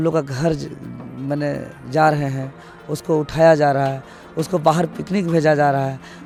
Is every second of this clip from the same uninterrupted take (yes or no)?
yes